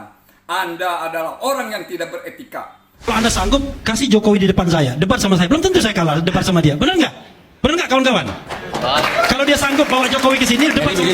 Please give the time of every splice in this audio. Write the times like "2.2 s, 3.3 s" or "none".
3.1 s